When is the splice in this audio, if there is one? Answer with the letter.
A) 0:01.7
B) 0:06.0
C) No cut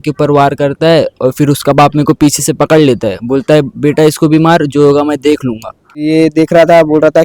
B